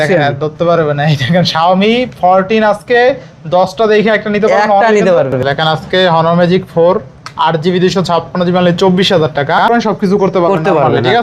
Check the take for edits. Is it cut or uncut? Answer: cut